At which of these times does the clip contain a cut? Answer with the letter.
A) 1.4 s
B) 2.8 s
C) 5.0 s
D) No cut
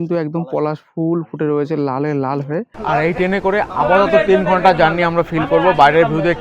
B